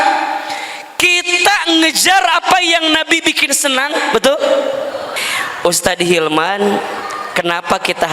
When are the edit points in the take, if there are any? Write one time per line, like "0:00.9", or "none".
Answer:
0:05.2